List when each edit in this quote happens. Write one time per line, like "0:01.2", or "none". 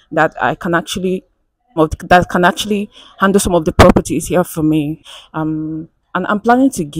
0:01.8
0:05.1